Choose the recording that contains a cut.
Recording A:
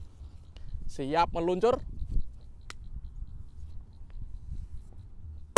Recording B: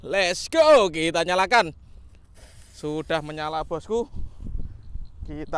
A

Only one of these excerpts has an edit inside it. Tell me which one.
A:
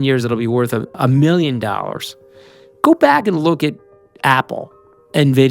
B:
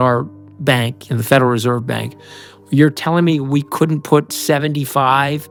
A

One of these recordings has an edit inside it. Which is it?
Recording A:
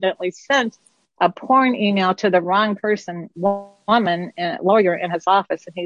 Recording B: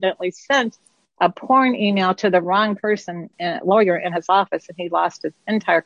B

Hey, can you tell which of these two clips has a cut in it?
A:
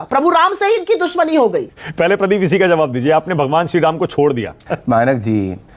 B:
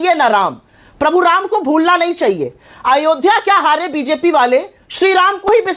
A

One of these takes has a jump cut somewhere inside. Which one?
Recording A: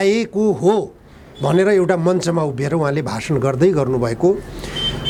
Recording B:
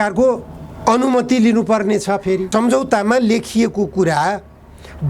B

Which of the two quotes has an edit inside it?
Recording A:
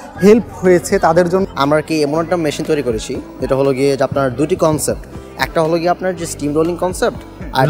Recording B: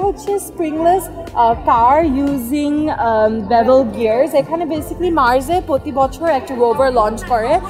A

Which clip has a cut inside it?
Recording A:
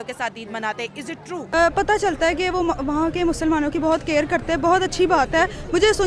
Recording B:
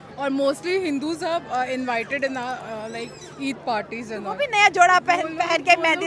A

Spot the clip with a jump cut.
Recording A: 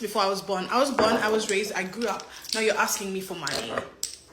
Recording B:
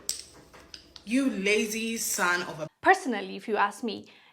B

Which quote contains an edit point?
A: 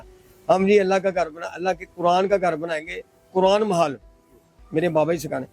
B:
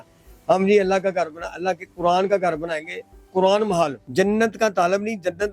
B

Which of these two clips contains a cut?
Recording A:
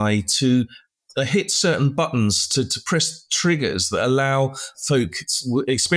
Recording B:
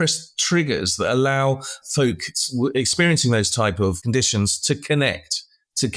B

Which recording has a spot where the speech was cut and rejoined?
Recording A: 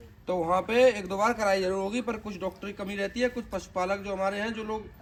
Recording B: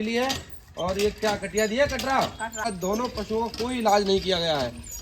B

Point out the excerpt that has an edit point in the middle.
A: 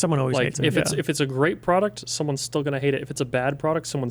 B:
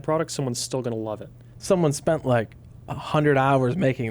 B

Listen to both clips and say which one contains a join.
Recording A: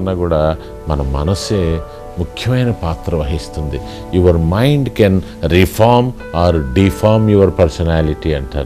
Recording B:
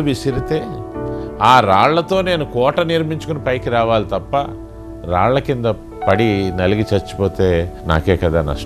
B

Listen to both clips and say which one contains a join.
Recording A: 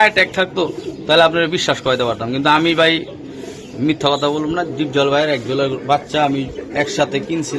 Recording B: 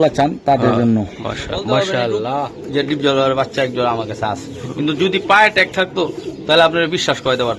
B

